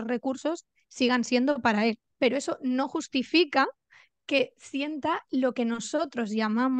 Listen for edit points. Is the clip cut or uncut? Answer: cut